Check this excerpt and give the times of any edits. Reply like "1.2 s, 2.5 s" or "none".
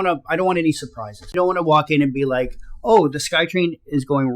1.3 s